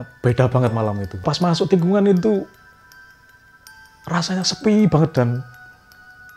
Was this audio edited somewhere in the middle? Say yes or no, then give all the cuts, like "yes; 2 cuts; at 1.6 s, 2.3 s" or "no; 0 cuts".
yes; 1 cut; at 1.2 s